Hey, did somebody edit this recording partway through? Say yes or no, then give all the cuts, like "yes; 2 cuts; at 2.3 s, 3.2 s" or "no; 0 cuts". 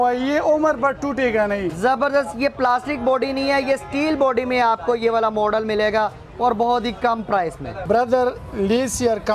no; 0 cuts